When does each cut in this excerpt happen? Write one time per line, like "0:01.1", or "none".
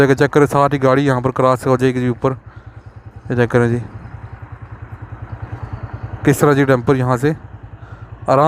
none